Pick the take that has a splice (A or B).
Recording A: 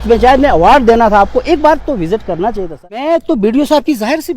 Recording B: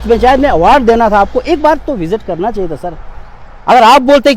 A